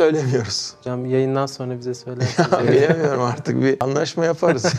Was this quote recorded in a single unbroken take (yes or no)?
yes